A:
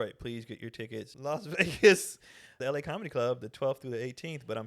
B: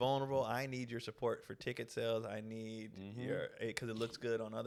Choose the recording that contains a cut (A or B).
A